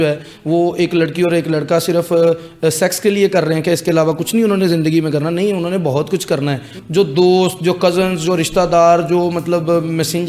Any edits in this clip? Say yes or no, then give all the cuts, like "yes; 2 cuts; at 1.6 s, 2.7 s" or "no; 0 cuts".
yes; 1 cut; at 6.7 s